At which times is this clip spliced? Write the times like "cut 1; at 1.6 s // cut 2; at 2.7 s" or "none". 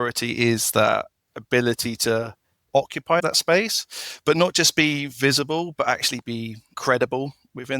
cut 1; at 3.2 s // cut 2; at 6.8 s